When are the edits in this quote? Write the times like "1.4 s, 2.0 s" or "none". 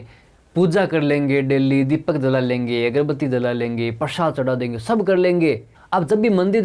5.7 s